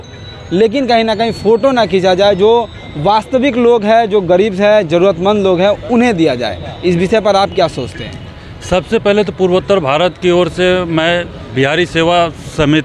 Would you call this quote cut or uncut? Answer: uncut